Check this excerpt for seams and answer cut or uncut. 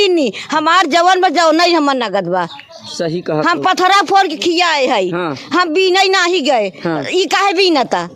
uncut